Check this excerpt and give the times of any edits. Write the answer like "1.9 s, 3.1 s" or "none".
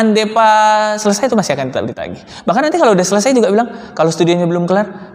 none